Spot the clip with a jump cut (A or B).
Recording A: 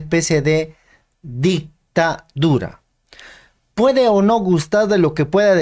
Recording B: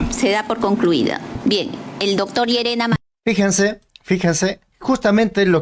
B